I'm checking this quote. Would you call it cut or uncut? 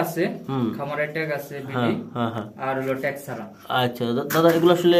uncut